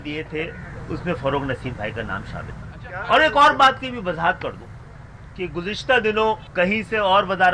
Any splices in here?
yes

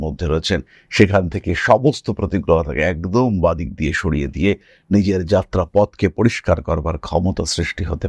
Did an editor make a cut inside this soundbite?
no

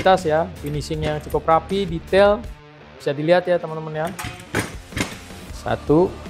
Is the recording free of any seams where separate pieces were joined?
no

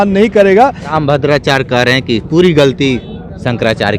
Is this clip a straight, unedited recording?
no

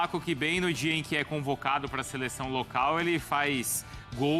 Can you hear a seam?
no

